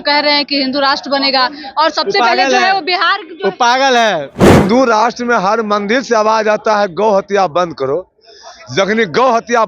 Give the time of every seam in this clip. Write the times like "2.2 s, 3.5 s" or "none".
4.3 s